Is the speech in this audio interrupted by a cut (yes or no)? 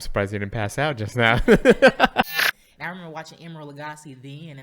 yes